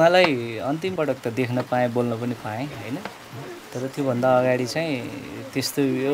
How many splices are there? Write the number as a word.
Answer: one